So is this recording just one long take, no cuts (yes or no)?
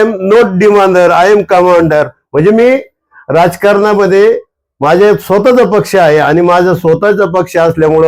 yes